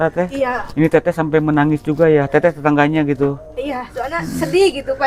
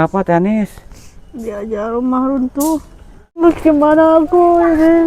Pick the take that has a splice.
second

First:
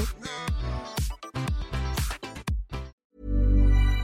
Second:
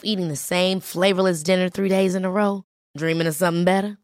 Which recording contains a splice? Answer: first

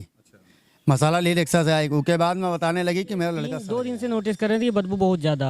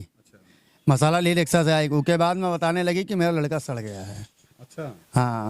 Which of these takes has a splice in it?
first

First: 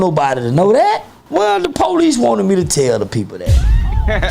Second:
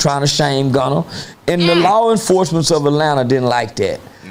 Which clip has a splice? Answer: first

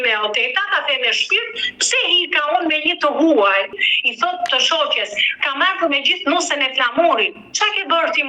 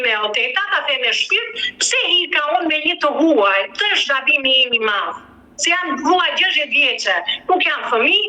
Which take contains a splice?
first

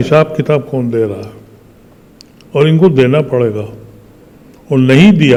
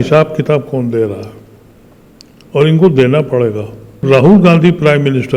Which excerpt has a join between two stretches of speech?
second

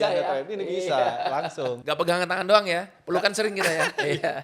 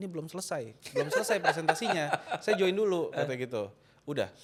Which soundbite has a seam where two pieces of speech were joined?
first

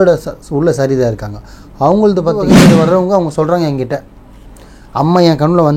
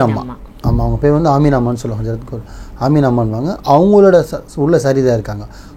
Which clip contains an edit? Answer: first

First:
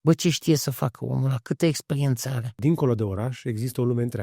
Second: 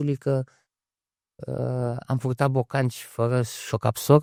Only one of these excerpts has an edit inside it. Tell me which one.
first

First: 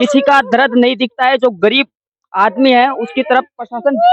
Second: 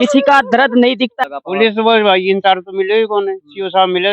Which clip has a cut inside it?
second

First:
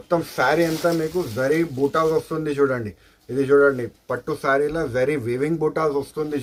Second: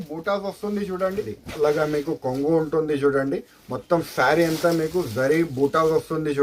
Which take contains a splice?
second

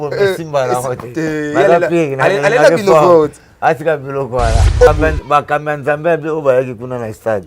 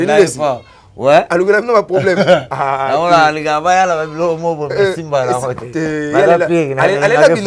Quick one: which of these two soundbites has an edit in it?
first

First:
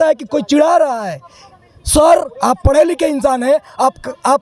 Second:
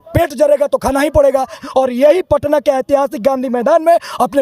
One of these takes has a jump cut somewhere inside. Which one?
second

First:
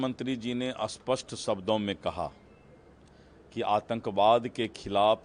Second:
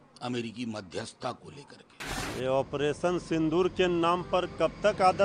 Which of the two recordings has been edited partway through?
second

